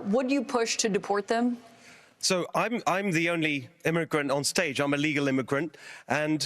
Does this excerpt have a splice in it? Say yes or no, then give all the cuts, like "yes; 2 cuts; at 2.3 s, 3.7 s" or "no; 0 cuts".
no; 0 cuts